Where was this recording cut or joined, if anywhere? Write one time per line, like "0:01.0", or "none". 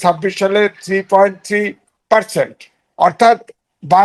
none